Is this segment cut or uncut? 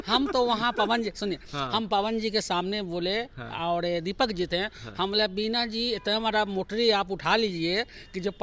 uncut